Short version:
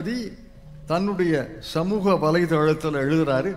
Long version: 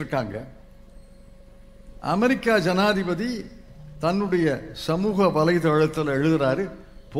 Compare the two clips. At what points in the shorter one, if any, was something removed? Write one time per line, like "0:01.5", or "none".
none